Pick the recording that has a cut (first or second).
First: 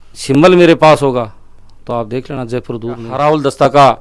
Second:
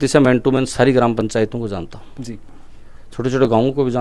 first